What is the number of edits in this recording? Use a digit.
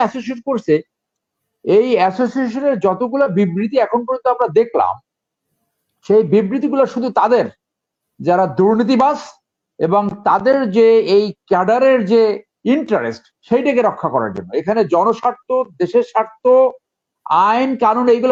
0